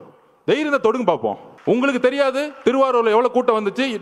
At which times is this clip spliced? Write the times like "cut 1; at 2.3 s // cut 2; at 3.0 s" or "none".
cut 1; at 1.5 s